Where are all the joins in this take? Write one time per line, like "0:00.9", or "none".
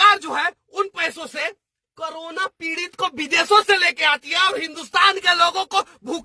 none